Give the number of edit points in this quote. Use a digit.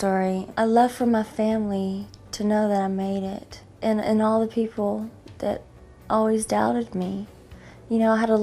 1